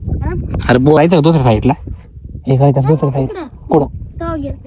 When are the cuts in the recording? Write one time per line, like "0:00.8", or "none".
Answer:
0:01.0